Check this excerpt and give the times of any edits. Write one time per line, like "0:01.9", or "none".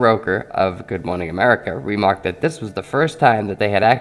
0:02.7